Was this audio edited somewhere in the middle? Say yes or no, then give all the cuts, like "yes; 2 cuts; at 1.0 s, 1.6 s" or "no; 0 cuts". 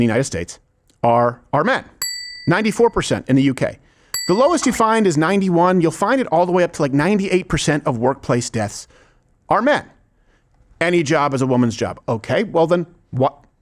no; 0 cuts